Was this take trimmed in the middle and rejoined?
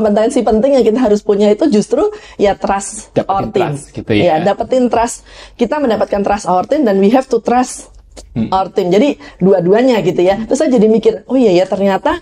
no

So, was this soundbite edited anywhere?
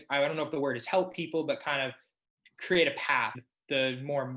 yes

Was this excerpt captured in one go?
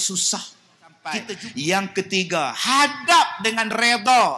no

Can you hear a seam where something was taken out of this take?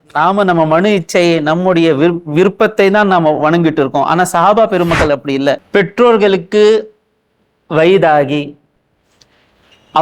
yes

